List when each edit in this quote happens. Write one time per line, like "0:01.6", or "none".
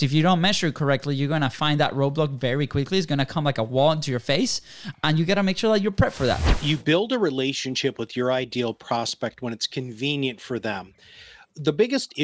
0:06.4

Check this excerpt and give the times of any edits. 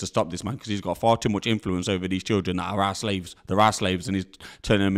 none

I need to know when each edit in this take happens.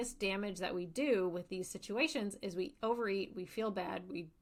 none

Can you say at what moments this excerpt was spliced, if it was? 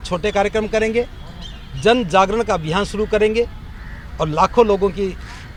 none

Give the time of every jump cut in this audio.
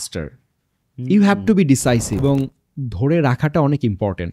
0:02.2

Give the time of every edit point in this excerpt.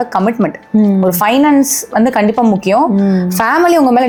none

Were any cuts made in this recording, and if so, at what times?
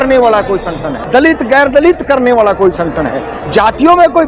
0:00.9

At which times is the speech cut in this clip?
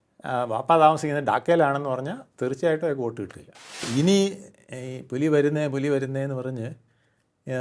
0:03.9

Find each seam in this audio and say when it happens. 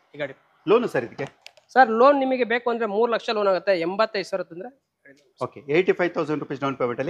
none

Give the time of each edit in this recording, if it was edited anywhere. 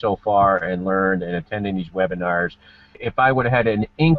0:03.0

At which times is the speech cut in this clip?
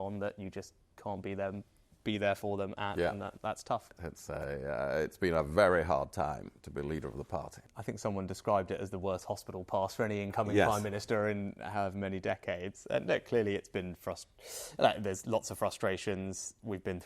0:03.9
0:07.7

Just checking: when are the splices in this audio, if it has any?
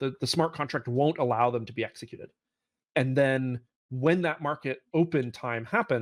none

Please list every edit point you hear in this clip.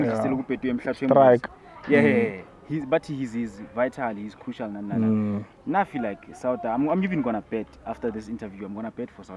none

